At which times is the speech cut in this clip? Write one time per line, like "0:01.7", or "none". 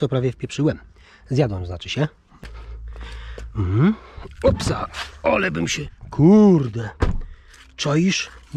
0:02.3